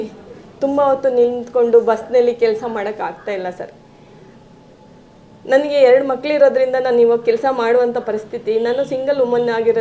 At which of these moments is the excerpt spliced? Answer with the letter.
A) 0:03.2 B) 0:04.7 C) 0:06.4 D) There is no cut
D